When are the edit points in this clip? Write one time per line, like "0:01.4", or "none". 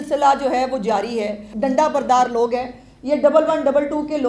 0:01.5